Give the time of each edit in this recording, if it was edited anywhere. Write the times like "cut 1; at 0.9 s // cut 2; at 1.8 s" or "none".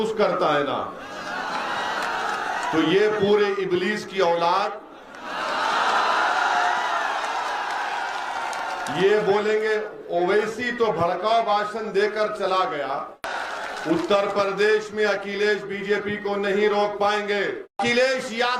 cut 1; at 13.2 s // cut 2; at 17.8 s